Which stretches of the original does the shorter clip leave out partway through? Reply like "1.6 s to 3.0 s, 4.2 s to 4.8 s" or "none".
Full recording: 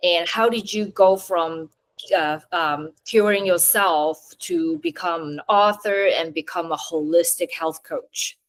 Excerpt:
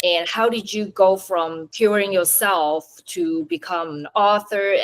1.6 s to 3.0 s